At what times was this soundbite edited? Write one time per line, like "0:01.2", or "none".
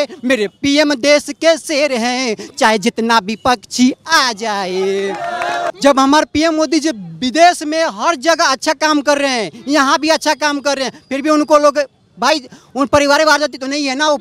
0:05.7